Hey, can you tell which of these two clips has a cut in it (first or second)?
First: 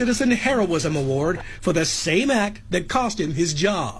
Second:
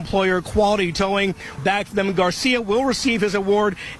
second